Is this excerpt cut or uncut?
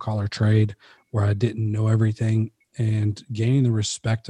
uncut